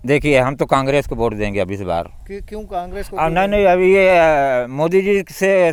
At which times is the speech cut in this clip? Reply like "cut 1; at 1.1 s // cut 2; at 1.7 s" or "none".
none